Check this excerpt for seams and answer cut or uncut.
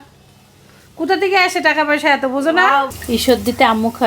cut